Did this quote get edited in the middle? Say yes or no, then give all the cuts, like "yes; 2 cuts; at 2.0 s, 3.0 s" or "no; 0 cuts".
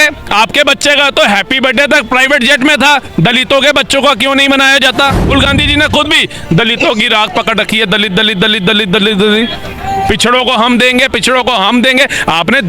yes; 1 cut; at 5.2 s